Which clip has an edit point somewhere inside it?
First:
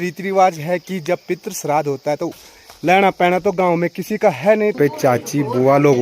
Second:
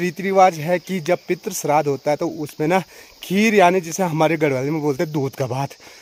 first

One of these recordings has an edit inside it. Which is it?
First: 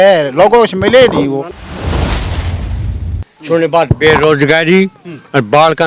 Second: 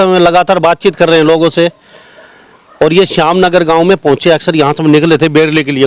first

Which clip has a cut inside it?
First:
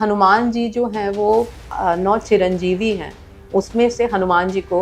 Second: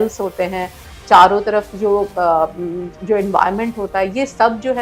first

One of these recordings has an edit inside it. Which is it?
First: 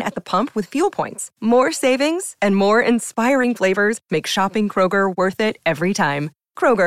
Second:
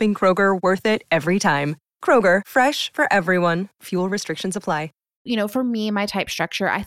second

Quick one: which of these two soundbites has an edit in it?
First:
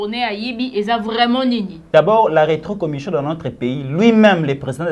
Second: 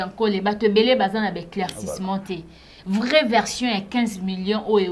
first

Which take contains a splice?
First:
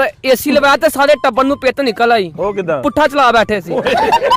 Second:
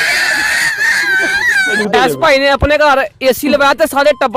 second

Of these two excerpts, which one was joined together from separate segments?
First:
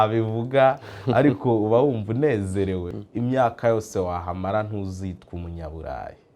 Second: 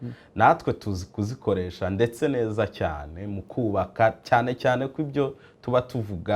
first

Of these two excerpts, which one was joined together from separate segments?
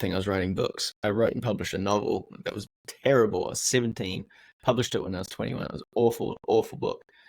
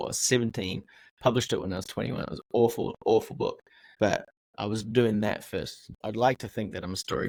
first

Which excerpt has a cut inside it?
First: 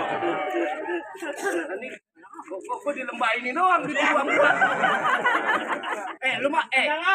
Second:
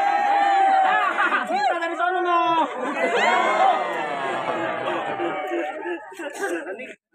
second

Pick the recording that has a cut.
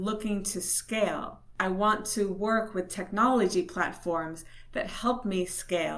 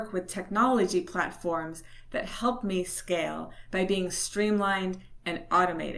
first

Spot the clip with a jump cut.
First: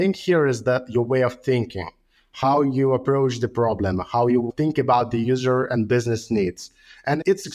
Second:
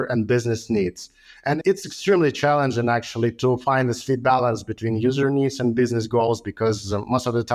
first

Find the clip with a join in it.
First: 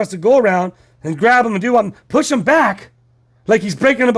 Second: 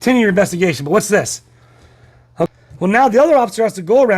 second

